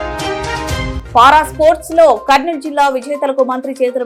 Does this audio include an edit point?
no; 0 cuts

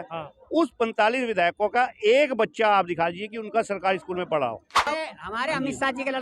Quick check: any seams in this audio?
yes; 1 cut; at 4.8 s

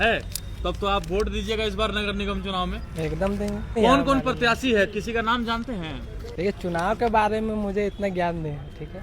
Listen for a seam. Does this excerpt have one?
yes; 2 cuts; at 3.8 s, 6.1 s

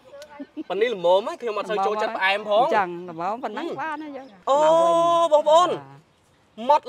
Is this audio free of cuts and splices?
no; 1 cut; at 4.4 s

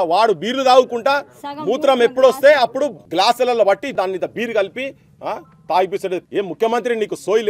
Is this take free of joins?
no; 3 cuts; at 3.0 s, 3.9 s, 6.2 s

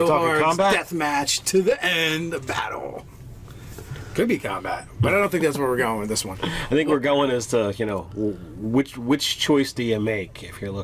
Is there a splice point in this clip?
yes; 1 cut; at 4.8 s

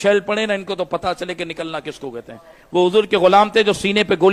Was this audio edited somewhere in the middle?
no; 0 cuts

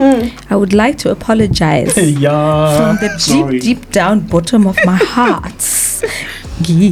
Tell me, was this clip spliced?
no; 0 cuts

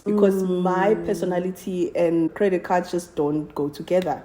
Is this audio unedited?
no; 1 cut; at 2.3 s

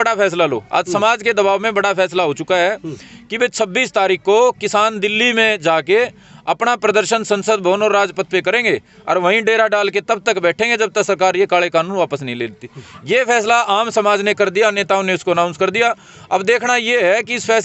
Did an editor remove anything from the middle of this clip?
no; 0 cuts

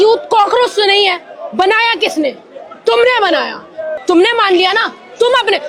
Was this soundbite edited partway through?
yes; 1 cut; at 3.9 s

